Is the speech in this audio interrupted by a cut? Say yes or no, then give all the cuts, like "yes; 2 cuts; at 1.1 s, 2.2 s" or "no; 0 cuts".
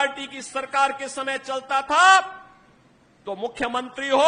no; 0 cuts